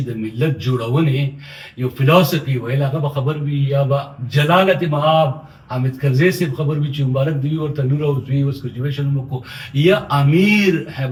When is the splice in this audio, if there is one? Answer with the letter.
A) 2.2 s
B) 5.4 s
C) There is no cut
C